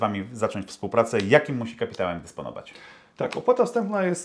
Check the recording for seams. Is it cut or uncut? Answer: uncut